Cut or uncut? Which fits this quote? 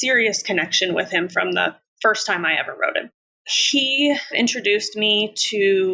cut